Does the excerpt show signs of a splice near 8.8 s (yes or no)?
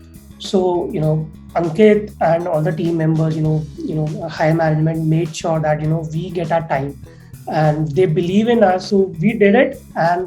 yes